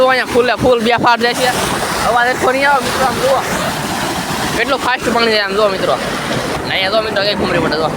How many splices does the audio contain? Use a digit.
1